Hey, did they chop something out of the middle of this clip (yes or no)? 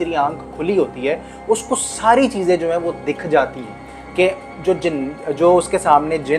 no